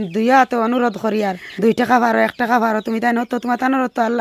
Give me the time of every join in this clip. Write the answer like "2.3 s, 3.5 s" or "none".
1.4 s